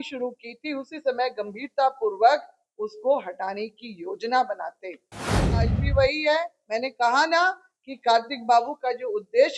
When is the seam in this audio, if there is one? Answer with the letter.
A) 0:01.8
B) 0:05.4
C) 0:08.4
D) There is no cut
B